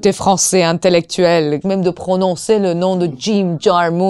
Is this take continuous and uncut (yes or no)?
no